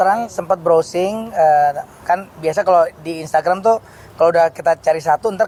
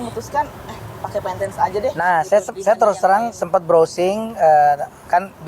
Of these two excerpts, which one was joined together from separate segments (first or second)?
second